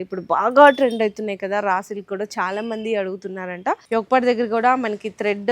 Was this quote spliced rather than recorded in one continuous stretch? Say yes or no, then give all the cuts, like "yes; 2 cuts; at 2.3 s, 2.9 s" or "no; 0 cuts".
yes; 1 cut; at 3.8 s